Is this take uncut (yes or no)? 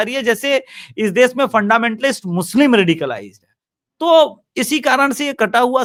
yes